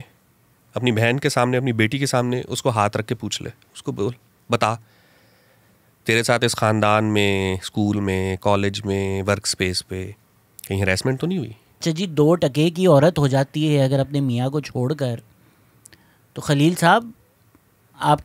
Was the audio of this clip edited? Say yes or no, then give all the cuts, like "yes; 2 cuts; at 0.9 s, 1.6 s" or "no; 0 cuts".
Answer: yes; 1 cut; at 11.8 s